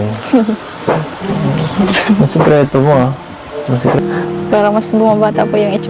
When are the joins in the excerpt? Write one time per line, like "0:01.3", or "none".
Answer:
0:04.0